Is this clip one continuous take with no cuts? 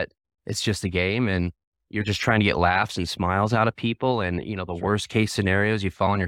yes; 0 cuts

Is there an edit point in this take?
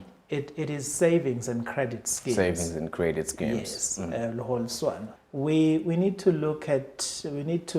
yes; 1 cut; at 5.1 s

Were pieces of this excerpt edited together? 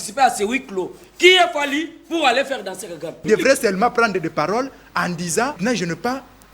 yes; 2 cuts; at 3.2 s, 5.6 s

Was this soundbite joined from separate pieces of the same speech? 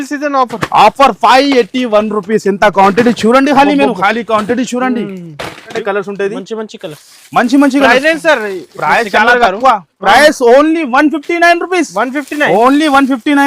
yes; 1 cut; at 5.8 s

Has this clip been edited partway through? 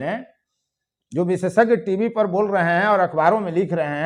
no; 0 cuts

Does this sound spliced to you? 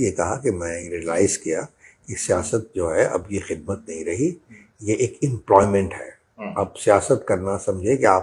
no; 0 cuts

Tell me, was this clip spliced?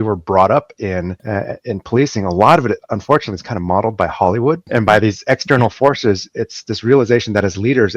yes; 2 cuts; at 1.2 s, 4.6 s

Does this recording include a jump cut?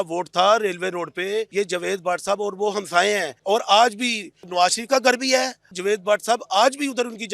yes; 4 cuts; at 1.5 s, 3.3 s, 4.4 s, 5.7 s

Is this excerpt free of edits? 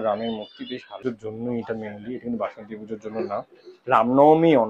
no; 2 cuts; at 1.0 s, 3.7 s

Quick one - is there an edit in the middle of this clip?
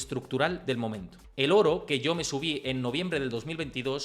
yes; 1 cut; at 1.1 s

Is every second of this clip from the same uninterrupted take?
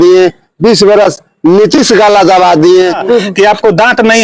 no; 1 cut; at 3.0 s

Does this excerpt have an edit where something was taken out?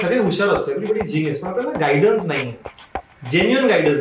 no; 0 cuts

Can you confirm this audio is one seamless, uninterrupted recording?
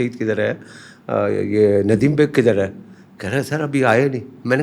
yes; 0 cuts

